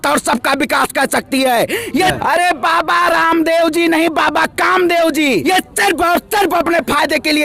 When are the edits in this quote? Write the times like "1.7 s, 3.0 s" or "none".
2.2 s, 5.4 s